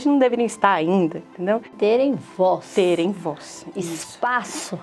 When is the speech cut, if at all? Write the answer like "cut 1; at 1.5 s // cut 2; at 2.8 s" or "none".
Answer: cut 1; at 1.7 s